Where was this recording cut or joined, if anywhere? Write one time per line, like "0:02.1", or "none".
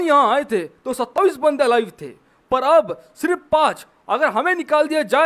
0:01.1

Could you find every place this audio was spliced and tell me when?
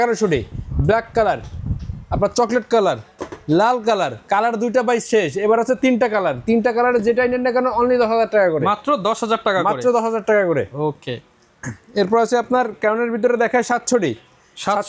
none

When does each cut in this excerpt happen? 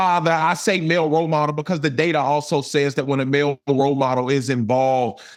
none

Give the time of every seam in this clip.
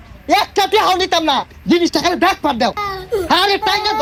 none

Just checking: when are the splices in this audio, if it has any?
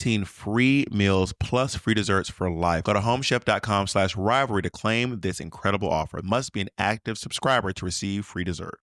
0:02.8
0:06.2

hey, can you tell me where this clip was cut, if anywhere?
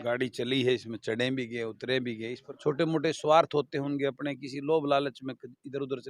0:02.4

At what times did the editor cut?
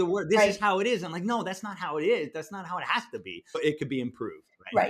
0:03.6

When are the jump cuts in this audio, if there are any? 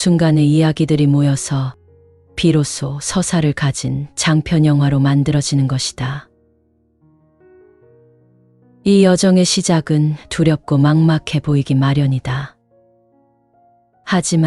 0:06.3
0:08.8

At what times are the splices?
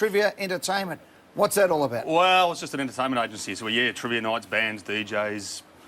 0:02.7

